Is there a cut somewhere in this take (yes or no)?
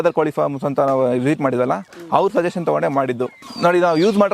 yes